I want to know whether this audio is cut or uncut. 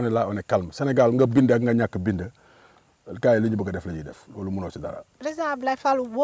cut